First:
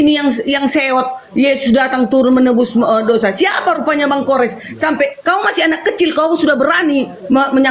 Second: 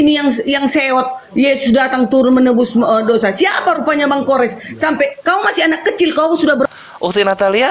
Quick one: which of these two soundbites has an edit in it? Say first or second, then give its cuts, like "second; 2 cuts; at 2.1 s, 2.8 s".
second; 1 cut; at 6.7 s